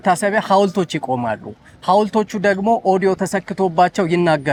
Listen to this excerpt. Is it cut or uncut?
uncut